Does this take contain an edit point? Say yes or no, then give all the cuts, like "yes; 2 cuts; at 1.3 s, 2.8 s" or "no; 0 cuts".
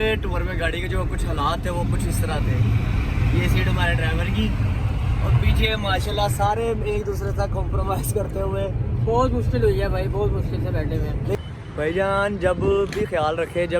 yes; 1 cut; at 11.3 s